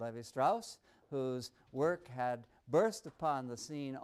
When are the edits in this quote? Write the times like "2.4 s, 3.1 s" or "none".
1.6 s

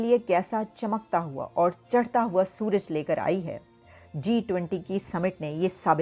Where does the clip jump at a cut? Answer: none

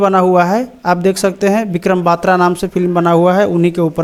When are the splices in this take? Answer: none

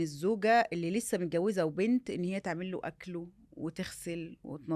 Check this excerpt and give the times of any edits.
none

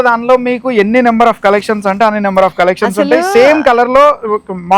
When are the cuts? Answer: none

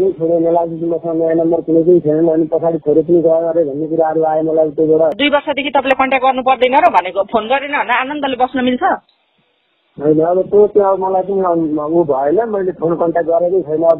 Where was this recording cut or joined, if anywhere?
5.1 s

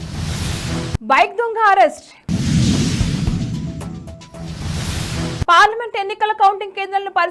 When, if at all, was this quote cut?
none

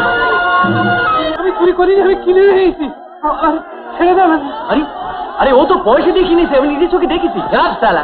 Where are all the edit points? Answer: 1.4 s

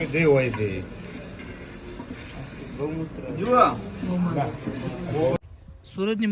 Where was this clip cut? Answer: 5.4 s

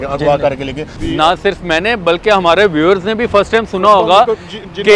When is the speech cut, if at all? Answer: 1.0 s

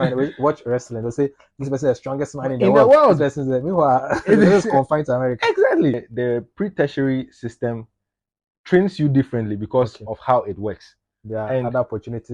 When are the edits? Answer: 6.1 s

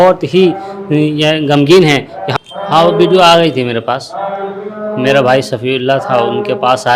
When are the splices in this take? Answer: 2.2 s

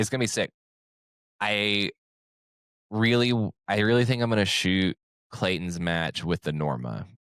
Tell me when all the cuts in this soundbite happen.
none

